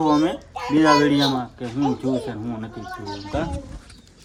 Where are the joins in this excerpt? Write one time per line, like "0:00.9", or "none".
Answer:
none